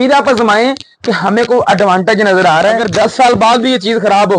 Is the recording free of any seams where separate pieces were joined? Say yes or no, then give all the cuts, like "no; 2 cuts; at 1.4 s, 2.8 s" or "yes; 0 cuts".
no; 1 cut; at 2.8 s